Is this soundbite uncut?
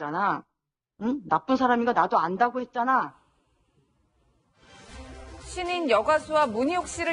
yes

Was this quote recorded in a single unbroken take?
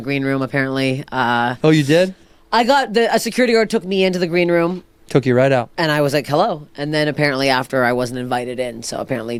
yes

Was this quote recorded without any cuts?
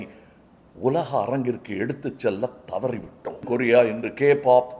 no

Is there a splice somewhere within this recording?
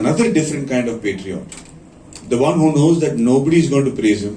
no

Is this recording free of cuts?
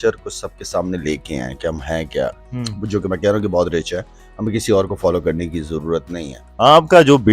yes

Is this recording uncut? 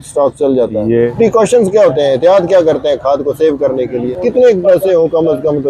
no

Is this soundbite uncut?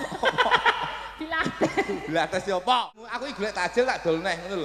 no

